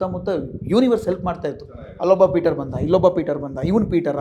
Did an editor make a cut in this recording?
no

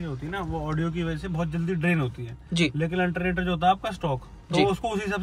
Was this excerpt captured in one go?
yes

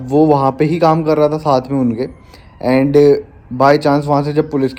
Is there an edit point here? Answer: no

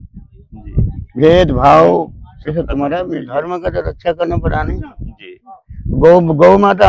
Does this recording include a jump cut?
yes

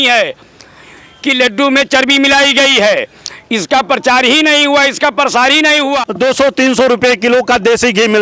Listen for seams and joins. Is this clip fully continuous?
no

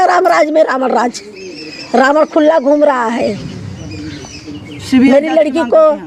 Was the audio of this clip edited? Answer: no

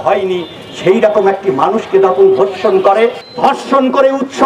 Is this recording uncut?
no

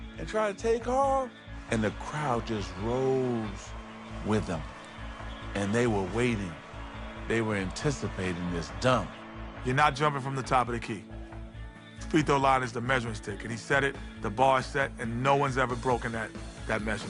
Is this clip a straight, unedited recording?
yes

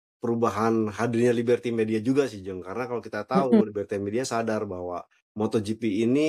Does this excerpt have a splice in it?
no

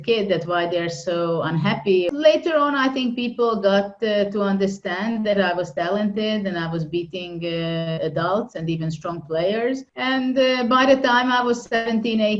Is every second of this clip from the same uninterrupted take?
no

